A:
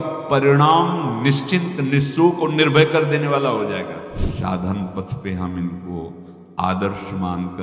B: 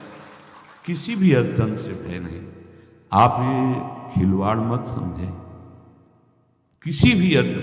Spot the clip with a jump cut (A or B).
A